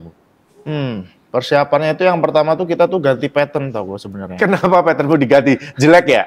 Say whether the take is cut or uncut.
uncut